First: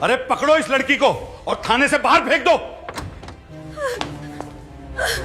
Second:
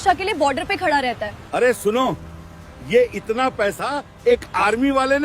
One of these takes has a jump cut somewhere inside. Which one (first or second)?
second